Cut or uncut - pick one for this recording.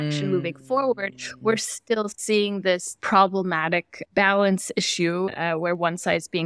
cut